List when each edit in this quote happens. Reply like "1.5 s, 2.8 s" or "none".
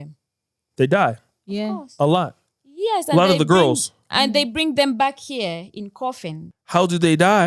6.5 s